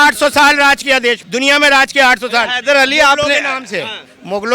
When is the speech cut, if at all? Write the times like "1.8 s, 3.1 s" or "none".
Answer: 1.3 s

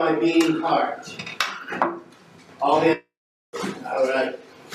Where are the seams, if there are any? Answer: 2.9 s

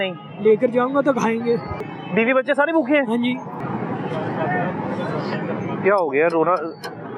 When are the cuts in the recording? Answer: 1.9 s, 3.6 s

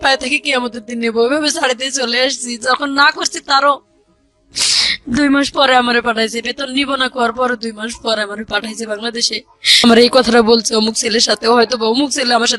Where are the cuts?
9.8 s

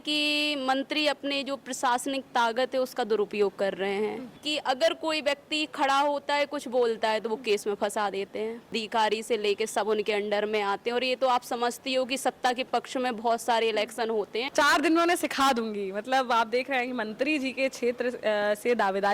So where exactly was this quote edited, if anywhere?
4.4 s, 8.8 s, 14.5 s

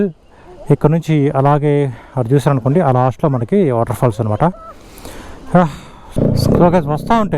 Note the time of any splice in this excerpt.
6.1 s

